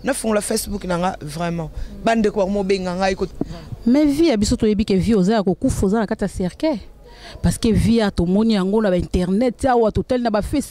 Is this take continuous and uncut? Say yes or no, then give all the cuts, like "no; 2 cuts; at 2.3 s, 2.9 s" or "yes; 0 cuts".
no; 1 cut; at 3.3 s